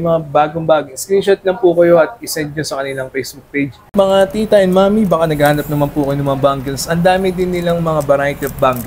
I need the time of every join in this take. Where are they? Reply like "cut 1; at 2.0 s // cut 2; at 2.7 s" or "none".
cut 1; at 3.8 s